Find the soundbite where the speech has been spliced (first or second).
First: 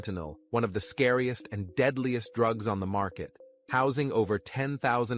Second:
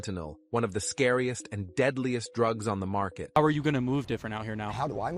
second